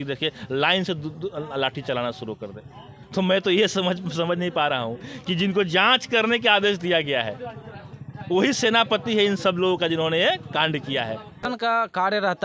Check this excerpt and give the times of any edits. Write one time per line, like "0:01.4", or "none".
0:11.4

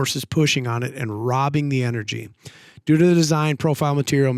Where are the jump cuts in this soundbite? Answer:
none

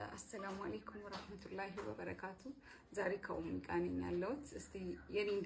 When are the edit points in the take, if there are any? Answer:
none

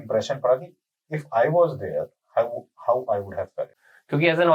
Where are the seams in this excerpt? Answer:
0:03.6

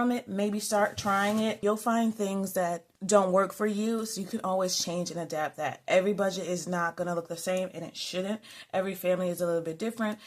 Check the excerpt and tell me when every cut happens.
0:01.6
0:02.9

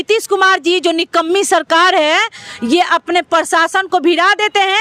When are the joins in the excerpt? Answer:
none

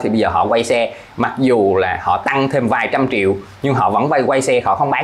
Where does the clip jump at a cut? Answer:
none

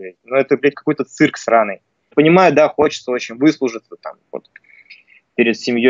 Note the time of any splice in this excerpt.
0:02.1

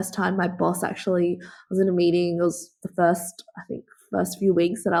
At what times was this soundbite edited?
none

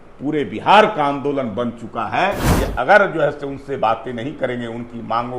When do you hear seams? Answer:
0:02.5

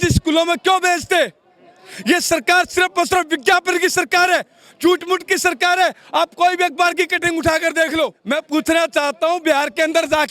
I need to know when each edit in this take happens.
0:08.2

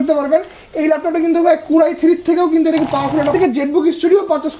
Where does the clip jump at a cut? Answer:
0:03.3

